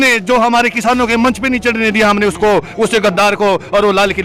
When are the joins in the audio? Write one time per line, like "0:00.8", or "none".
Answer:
none